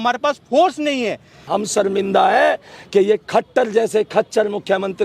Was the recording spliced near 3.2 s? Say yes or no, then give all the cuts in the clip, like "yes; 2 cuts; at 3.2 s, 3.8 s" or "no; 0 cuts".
no; 1 cut; at 1.4 s